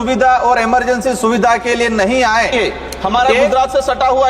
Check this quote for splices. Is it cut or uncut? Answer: cut